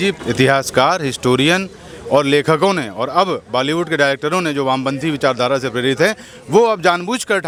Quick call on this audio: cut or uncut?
uncut